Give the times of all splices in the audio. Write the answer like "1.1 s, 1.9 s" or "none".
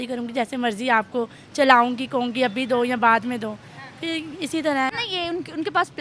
5.0 s